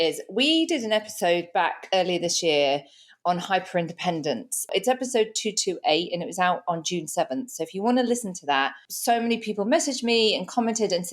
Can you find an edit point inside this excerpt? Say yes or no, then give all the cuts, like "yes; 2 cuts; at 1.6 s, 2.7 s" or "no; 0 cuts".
yes; 2 cuts; at 4.7 s, 8.9 s